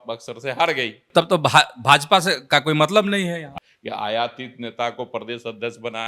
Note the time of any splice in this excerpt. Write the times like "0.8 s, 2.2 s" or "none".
1.0 s, 3.6 s